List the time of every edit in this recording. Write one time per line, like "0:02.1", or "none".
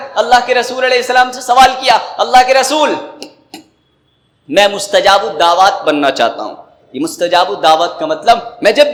none